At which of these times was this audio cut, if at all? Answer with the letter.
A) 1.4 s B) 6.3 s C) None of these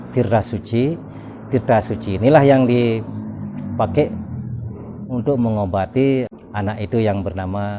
B